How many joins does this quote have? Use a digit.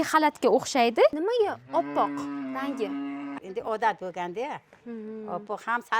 2